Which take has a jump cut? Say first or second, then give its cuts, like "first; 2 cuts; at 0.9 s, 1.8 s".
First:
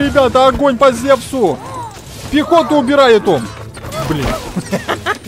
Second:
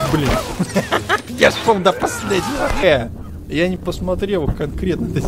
second; 1 cut; at 2.8 s